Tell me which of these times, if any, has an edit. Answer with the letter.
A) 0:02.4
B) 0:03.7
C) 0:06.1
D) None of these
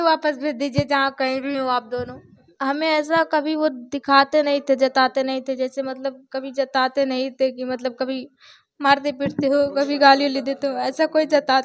A